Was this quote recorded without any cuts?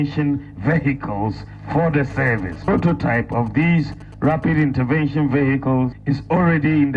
yes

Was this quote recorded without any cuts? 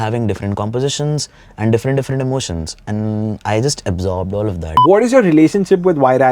no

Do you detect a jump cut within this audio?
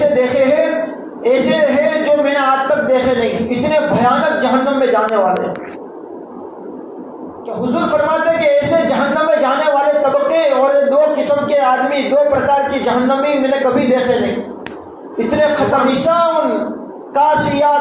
yes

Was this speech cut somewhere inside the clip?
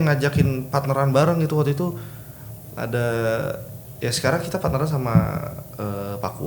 no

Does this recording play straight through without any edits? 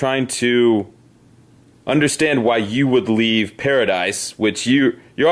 yes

